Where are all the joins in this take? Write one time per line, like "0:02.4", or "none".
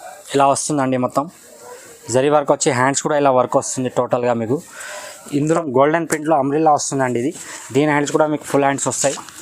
0:05.5